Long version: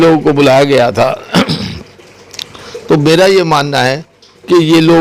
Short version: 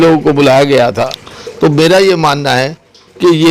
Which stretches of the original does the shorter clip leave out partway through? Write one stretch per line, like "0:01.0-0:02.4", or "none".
0:01.1-0:02.4